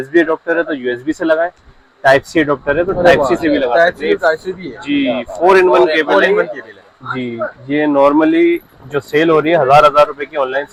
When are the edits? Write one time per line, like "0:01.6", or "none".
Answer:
none